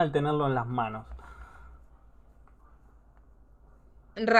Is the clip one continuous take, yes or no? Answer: yes